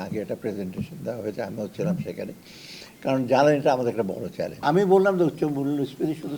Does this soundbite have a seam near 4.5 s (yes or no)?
yes